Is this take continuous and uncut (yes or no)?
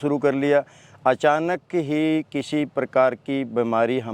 yes